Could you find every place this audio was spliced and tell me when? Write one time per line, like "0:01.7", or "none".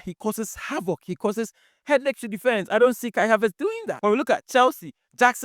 0:03.9